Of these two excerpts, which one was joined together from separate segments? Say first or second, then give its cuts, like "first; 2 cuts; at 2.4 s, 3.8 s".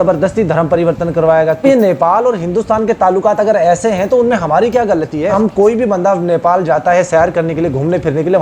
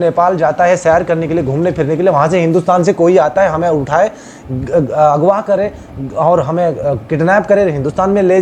first; 2 cuts; at 1.6 s, 5.3 s